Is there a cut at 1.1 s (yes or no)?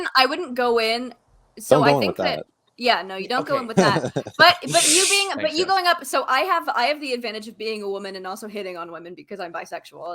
no